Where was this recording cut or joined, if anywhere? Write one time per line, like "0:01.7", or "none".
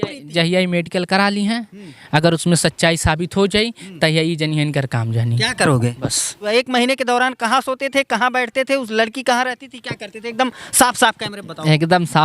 0:06.5

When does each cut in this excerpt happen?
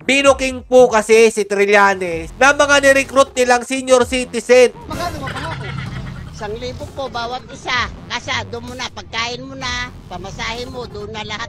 0:04.8

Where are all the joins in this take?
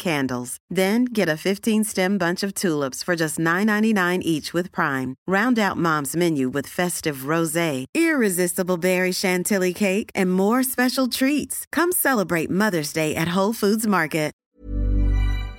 0:14.4

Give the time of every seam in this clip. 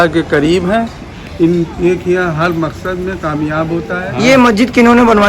0:04.1

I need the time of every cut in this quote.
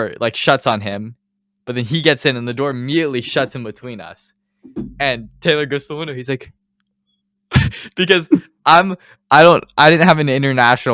none

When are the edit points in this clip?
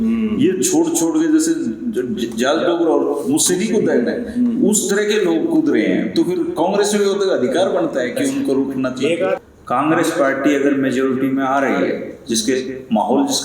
0:09.4

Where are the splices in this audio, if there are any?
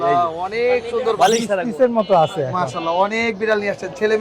0:01.6

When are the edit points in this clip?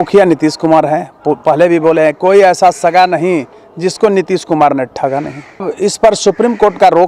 0:05.7

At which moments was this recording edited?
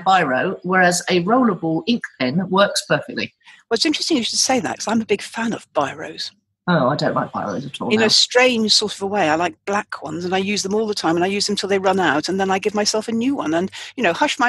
none

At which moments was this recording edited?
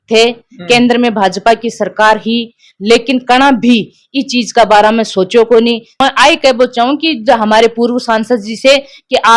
0:06.0

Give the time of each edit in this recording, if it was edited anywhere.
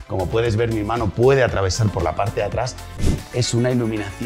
0:02.8

